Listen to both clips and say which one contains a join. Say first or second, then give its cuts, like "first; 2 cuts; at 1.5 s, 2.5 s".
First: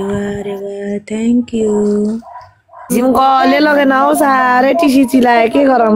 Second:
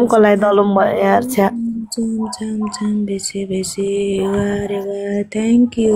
first; 1 cut; at 2.9 s